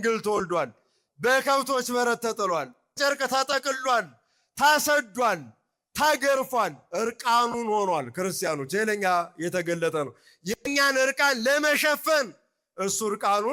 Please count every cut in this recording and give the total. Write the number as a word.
zero